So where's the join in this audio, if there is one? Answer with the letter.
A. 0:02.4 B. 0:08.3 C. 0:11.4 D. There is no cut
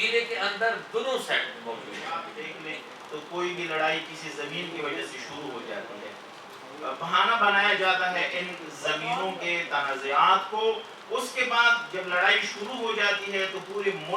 A